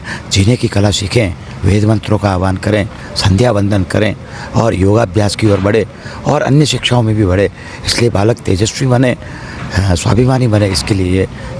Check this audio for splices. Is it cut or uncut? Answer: uncut